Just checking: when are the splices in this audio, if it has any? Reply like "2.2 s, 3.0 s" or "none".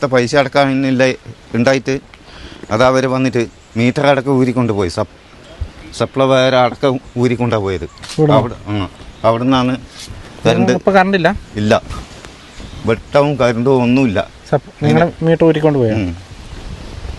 none